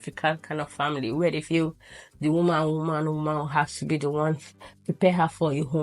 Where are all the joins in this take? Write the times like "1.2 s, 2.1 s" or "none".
none